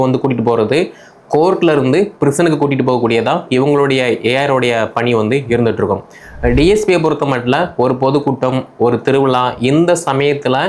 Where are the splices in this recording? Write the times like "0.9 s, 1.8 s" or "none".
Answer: none